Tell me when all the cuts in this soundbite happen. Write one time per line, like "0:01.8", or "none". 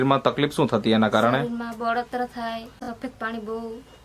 0:02.8